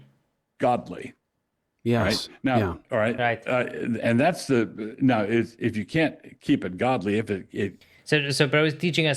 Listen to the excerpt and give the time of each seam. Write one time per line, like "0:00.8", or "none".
none